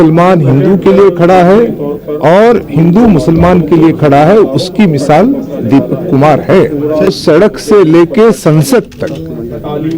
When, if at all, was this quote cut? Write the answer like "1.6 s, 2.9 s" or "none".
7.1 s